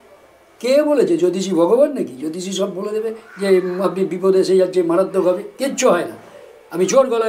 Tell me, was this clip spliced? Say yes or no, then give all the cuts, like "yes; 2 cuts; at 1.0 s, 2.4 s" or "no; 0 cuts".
no; 0 cuts